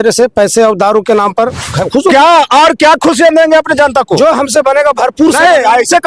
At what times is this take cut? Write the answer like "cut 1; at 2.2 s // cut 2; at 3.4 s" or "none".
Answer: cut 1; at 1.7 s